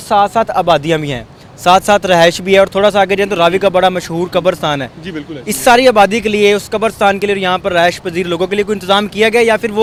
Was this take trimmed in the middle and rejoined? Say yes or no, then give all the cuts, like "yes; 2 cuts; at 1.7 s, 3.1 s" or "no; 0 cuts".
no; 0 cuts